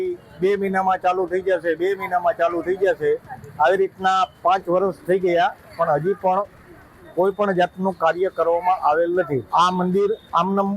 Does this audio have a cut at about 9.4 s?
yes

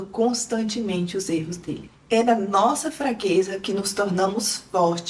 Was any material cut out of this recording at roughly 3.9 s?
no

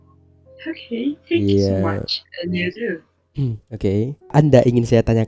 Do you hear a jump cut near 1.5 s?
no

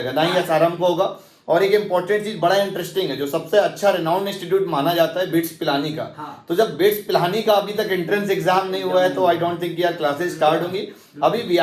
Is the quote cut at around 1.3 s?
no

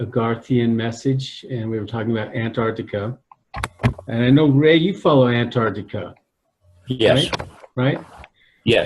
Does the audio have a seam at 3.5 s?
no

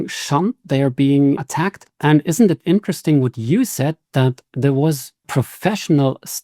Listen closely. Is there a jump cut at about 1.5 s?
yes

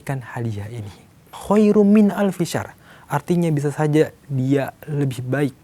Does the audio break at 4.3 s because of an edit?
no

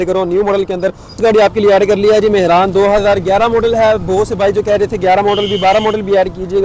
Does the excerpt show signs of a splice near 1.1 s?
yes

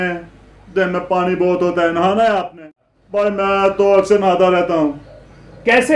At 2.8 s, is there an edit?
yes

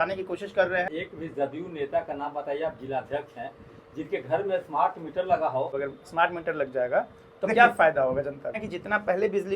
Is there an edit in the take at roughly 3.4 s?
no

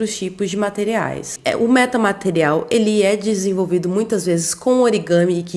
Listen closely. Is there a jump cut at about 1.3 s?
yes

